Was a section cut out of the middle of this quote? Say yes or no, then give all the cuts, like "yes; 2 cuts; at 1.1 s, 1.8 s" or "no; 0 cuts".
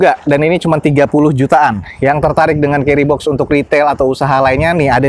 no; 0 cuts